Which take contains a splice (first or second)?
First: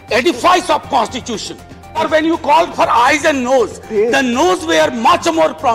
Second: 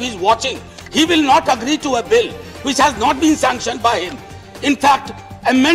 first